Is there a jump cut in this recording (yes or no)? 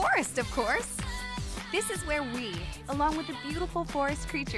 no